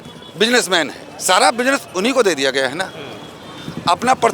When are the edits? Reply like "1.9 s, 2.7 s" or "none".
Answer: none